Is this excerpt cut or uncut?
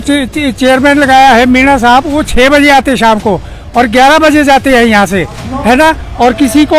uncut